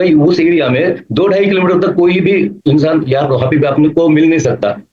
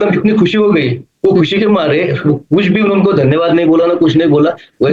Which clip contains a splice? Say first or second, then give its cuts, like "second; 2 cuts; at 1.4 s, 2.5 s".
first; 1 cut; at 2.5 s